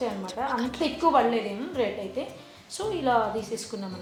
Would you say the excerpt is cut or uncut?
uncut